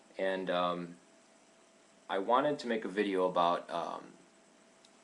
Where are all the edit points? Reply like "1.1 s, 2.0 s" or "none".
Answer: none